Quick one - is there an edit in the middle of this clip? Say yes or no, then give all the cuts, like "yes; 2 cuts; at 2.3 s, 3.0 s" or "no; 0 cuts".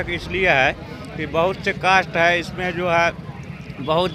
no; 0 cuts